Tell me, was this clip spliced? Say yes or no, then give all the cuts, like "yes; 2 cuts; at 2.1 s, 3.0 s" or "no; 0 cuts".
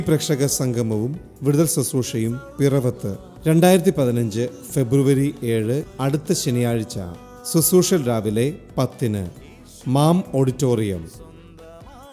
no; 0 cuts